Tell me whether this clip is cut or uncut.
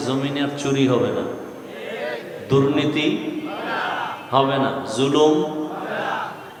uncut